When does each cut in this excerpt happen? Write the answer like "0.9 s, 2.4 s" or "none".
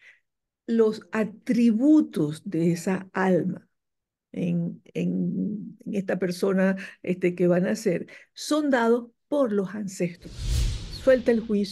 10.8 s